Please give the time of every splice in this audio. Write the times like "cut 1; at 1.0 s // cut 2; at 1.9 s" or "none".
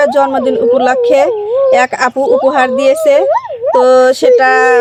none